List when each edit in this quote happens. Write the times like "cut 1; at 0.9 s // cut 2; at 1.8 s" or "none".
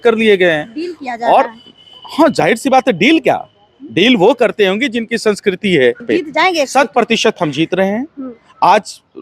cut 1; at 6.0 s